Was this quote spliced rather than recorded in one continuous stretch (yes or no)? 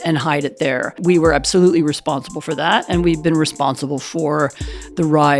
yes